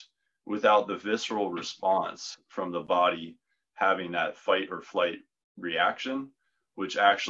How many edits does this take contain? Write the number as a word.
zero